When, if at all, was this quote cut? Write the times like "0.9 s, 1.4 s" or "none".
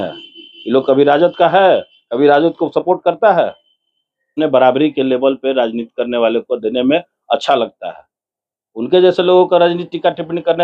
4.3 s